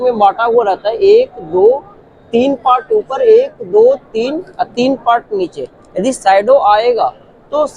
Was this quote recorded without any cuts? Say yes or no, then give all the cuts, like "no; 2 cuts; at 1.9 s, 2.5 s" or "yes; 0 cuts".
yes; 0 cuts